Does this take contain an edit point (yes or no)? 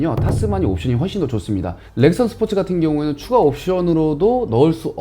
yes